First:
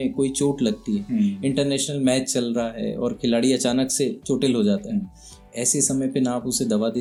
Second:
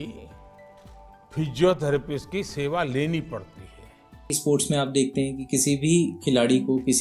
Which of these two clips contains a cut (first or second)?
second